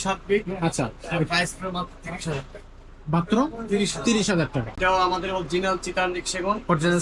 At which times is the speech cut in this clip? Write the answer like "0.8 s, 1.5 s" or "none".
4.8 s